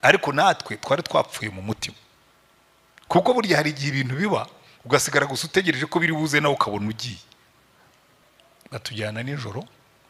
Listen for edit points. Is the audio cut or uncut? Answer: cut